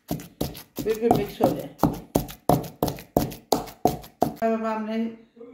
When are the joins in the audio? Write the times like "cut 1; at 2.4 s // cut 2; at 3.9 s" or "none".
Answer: cut 1; at 4.3 s

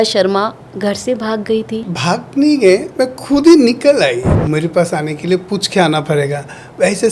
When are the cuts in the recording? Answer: cut 1; at 1.9 s // cut 2; at 4.3 s

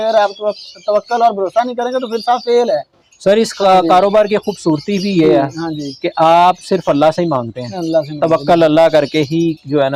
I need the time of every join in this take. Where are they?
none

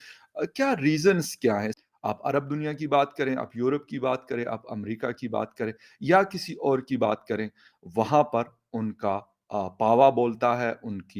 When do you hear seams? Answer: cut 1; at 1.8 s

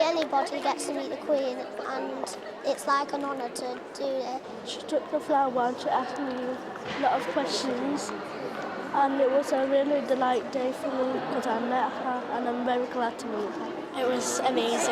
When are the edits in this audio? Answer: cut 1; at 2.4 s

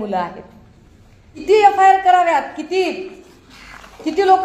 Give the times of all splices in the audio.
cut 1; at 1.4 s

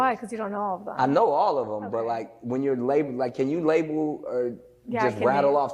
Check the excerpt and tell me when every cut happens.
cut 1; at 1.4 s // cut 2; at 3.1 s

